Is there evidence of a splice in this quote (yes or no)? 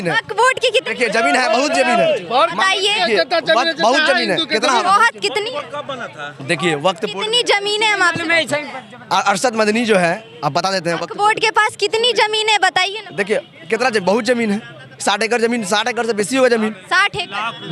no